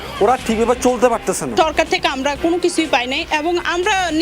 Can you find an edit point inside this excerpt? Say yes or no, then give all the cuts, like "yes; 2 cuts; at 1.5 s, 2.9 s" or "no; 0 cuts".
yes; 1 cut; at 1.5 s